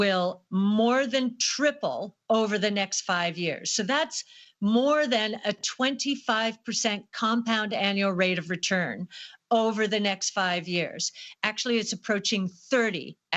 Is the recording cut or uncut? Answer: uncut